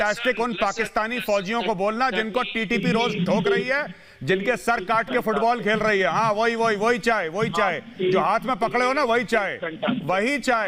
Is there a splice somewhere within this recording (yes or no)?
no